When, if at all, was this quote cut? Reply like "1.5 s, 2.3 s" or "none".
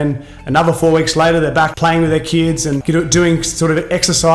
1.7 s, 2.8 s

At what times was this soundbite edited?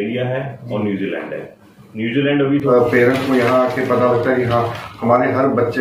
2.6 s

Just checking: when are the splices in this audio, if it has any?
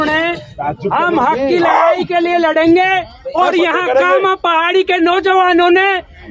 none

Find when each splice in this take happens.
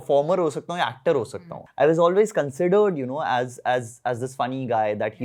none

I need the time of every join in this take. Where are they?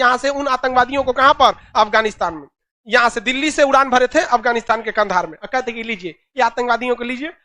none

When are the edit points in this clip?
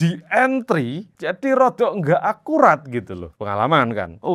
none

